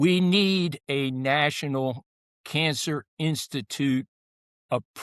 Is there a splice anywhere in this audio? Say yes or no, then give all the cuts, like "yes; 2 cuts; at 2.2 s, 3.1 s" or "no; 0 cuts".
no; 0 cuts